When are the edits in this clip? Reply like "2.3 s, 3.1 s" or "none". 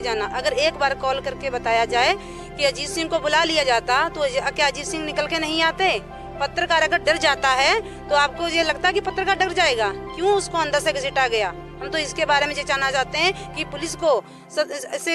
none